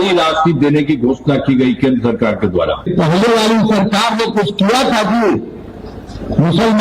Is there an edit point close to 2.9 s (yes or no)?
yes